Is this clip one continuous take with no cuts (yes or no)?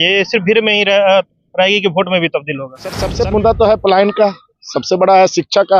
no